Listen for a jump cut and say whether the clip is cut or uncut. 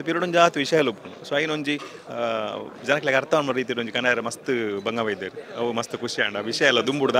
uncut